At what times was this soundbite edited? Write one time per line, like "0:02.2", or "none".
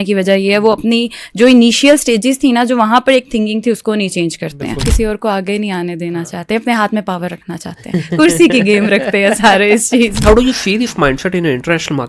0:04.9
0:10.2